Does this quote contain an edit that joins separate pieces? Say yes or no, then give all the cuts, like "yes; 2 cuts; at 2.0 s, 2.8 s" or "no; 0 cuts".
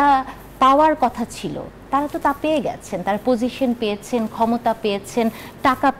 no; 0 cuts